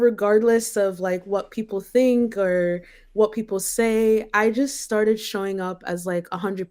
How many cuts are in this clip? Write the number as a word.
zero